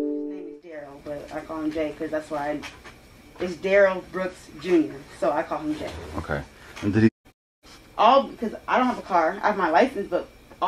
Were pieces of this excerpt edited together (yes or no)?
yes